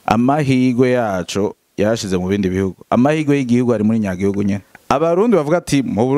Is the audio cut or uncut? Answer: cut